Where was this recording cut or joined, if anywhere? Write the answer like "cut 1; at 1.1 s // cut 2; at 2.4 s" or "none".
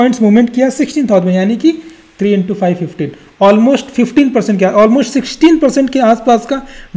none